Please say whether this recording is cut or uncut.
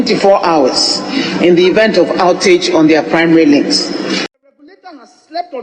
cut